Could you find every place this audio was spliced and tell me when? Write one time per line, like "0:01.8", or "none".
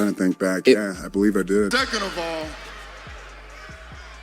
0:01.7